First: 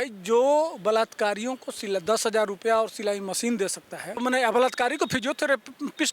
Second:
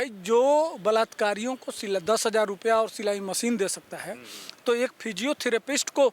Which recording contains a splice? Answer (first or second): first